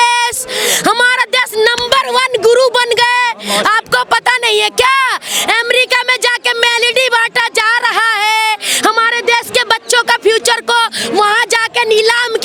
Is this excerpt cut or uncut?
uncut